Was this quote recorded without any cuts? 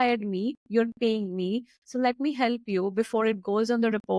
yes; 0 cuts

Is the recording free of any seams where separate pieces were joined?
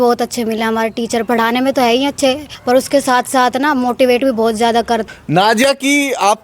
no; 2 cuts; at 2.5 s, 5.0 s

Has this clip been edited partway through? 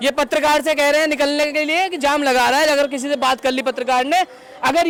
no; 0 cuts

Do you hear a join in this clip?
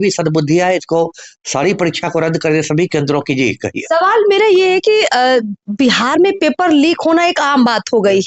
no; 0 cuts

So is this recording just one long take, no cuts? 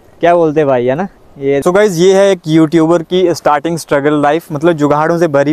no; 1 cut; at 1.6 s

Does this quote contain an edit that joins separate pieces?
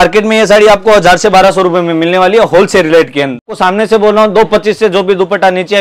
yes; 1 cut; at 3.4 s

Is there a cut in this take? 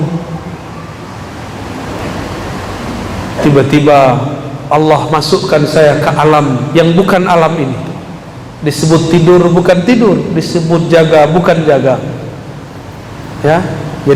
yes; 1 cut; at 2.0 s

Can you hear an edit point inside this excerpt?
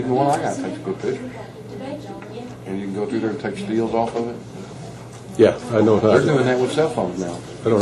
yes; 1 cut; at 5.9 s

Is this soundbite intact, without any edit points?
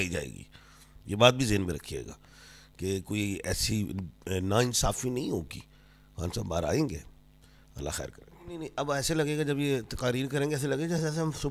no; 1 cut; at 8.6 s

